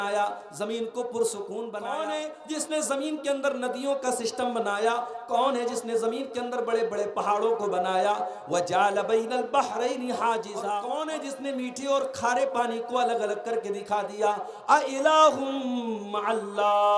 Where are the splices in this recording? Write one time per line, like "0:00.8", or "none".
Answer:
0:02.0
0:10.7